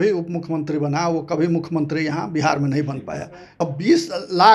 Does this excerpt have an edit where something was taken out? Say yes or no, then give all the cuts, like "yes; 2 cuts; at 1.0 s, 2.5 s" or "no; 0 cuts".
yes; 1 cut; at 3.6 s